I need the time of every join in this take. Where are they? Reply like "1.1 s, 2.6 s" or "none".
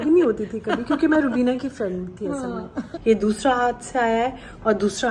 2.9 s